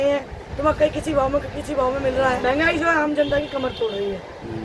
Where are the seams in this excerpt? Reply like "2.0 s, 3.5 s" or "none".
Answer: 2.4 s

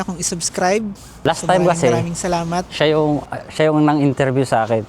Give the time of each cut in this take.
1.2 s

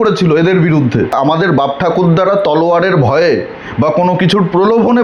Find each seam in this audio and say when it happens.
1.1 s

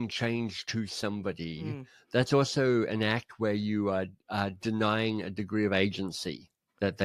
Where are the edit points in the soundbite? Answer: none

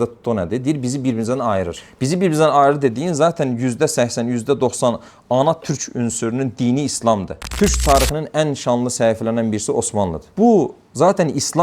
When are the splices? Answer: 7.4 s

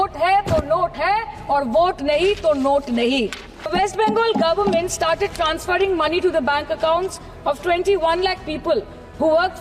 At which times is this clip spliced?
3.7 s

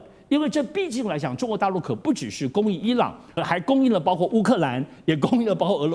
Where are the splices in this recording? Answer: 3.3 s

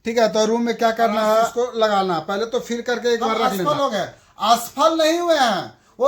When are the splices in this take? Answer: 1.5 s, 3.7 s

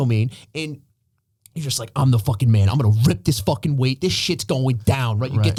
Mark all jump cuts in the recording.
none

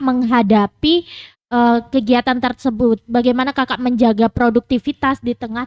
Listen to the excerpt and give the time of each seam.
none

